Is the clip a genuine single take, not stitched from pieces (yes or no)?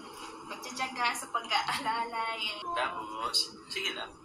no